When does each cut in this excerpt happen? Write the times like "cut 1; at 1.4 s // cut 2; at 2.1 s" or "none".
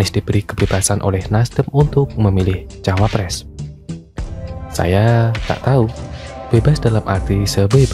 none